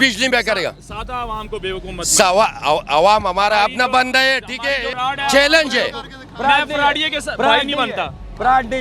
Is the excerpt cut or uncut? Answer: cut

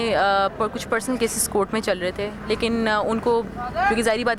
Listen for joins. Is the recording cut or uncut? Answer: uncut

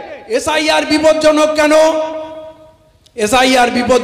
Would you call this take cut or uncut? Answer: uncut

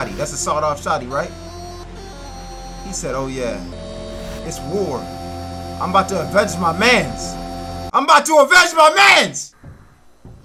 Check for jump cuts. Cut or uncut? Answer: cut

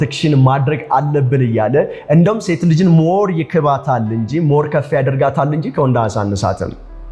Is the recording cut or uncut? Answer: uncut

